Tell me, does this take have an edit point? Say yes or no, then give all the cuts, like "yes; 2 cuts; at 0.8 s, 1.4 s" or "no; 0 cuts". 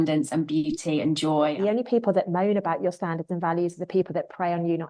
yes; 1 cut; at 1.5 s